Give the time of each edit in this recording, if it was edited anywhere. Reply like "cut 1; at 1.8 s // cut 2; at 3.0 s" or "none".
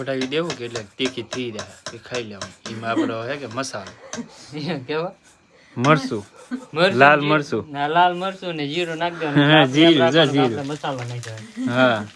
none